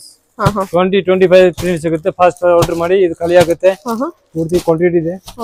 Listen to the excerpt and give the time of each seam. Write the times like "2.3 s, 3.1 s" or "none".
none